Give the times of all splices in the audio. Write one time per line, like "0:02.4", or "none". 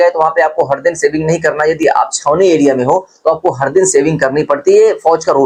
none